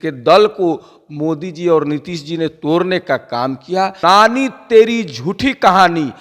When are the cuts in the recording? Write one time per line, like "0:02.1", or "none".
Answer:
0:04.0